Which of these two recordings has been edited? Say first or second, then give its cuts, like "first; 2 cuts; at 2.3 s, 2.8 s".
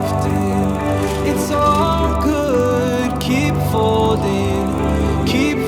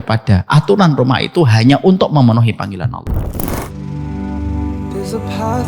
second; 1 cut; at 3.5 s